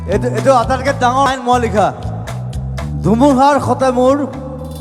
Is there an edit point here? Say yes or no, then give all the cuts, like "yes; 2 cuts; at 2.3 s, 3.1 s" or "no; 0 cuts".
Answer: yes; 1 cut; at 1.3 s